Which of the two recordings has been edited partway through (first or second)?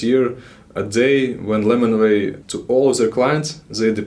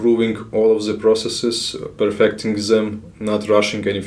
first